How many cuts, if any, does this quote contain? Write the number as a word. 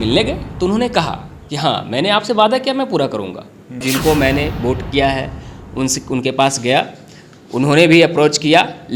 one